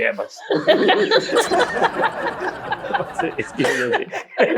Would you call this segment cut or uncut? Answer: uncut